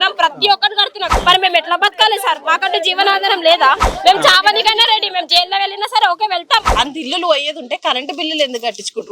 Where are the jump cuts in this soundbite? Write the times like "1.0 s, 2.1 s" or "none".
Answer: 1.1 s, 3.9 s, 6.7 s

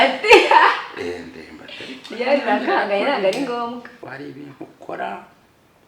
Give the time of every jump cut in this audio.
4.1 s

